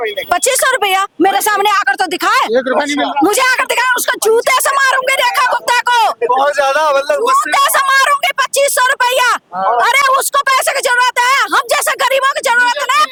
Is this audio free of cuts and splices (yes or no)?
yes